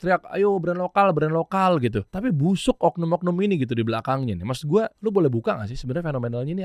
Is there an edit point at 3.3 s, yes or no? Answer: no